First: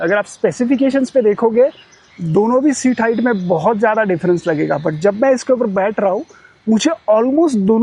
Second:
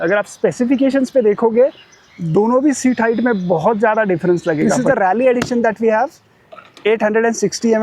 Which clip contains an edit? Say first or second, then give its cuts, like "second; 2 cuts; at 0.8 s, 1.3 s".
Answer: second; 1 cut; at 4.8 s